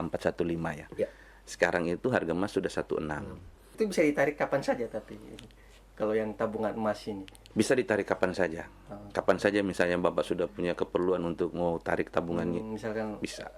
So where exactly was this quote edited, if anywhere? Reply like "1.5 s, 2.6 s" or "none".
3.7 s